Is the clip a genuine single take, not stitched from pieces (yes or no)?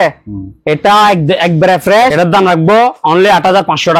no